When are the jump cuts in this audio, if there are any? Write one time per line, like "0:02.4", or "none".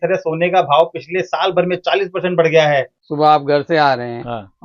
0:03.0

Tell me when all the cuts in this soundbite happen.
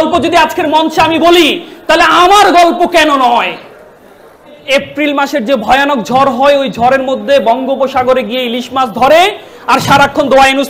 0:04.6

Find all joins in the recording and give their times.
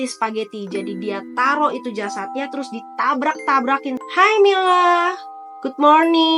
0:04.0

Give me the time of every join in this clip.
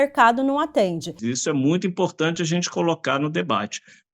0:01.2

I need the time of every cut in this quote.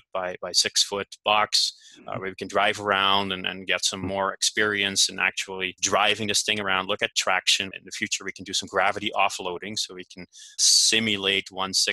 0:05.8
0:07.8
0:10.6

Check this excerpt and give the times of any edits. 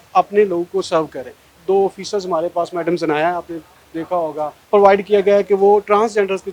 0:01.6
0:04.6

